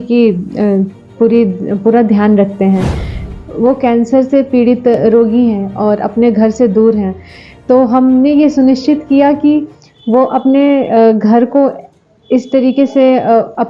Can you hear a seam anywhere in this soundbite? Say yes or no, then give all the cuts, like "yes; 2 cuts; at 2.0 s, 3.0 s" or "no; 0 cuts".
yes; 1 cut; at 3.3 s